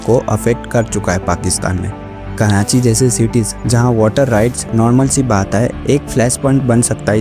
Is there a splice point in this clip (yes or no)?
no